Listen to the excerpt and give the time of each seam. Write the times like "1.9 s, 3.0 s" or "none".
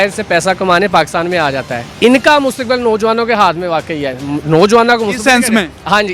1.9 s